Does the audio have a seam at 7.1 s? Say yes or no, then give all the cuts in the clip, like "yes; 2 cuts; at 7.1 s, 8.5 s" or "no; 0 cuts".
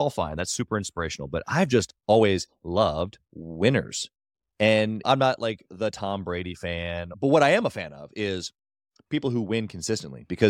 yes; 3 cuts; at 1.9 s, 5.0 s, 7.1 s